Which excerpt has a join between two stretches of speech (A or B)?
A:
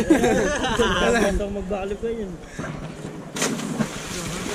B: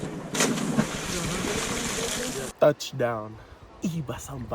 B